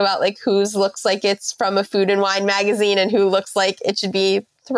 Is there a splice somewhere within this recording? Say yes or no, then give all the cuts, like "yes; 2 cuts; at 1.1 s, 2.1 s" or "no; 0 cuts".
no; 0 cuts